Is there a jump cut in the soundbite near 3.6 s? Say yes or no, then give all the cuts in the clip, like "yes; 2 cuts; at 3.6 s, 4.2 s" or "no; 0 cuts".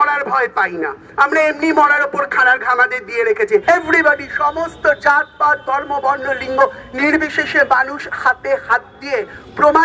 yes; 1 cut; at 3.6 s